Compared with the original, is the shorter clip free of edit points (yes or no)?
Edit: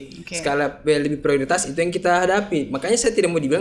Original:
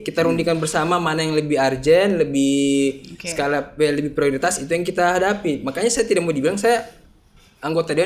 yes